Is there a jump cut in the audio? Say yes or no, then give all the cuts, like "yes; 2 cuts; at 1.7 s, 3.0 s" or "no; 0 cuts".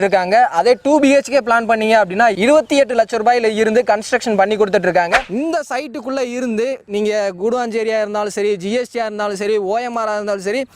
yes; 1 cut; at 5.3 s